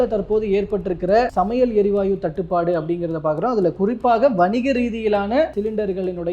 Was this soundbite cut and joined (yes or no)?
no